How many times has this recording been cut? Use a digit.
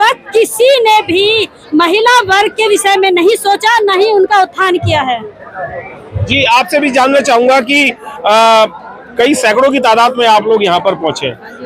0